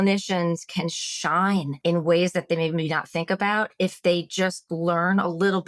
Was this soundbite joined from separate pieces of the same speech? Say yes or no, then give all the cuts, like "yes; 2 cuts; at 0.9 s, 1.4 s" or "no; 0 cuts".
yes; 1 cut; at 1.7 s